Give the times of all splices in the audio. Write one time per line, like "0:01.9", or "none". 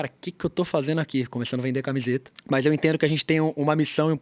0:02.3